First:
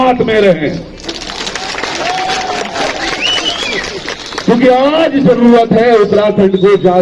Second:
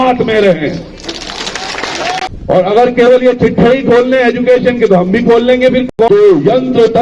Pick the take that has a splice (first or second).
second